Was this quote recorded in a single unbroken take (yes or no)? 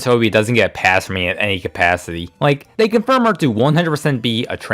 no